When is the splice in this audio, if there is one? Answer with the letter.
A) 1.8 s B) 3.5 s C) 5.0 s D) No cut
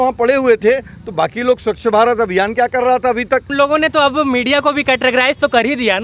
B